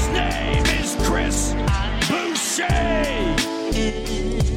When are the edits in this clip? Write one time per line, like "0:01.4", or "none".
none